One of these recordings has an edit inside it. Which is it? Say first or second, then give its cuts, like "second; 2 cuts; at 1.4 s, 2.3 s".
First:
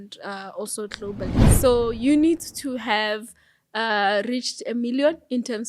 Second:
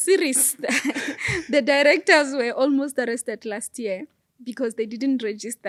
first; 1 cut; at 1.4 s